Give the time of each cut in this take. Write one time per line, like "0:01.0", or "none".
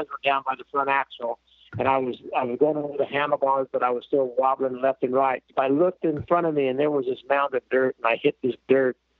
0:05.5